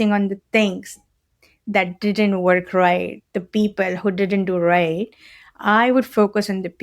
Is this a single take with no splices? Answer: yes; 0 cuts

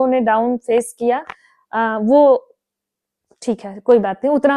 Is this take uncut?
yes; 0 cuts

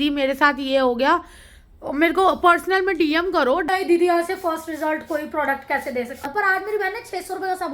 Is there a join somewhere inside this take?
yes; 2 cuts; at 3.7 s, 6.2 s

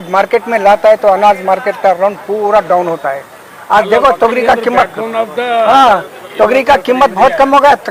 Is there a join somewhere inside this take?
no; 0 cuts

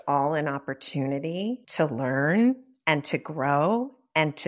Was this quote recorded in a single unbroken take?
yes; 0 cuts

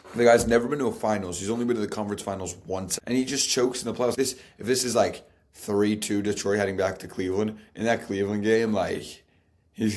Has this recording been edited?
yes; 2 cuts; at 2.9 s, 4.1 s

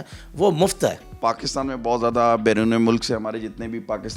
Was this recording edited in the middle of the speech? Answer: yes; 1 cut; at 1.1 s

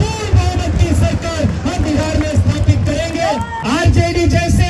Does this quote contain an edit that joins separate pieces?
yes; 1 cut; at 3.6 s

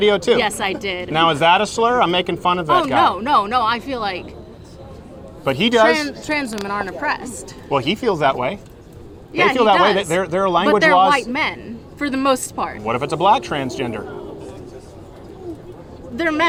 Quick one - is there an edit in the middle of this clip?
no; 0 cuts

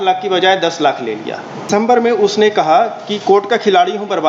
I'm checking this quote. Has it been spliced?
yes; 1 cut; at 1.8 s

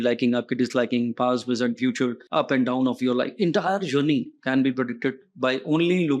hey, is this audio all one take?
no; 1 cut; at 2.2 s

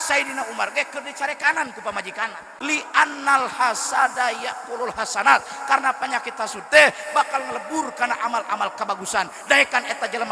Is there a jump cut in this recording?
yes; 1 cut; at 2.5 s

